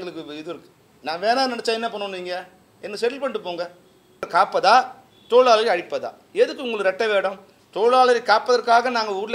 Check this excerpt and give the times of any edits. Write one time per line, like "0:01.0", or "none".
0:04.2